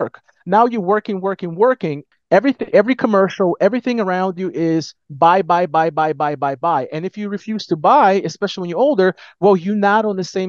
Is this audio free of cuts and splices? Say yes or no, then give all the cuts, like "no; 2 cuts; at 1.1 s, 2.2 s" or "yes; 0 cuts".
no; 1 cut; at 2.0 s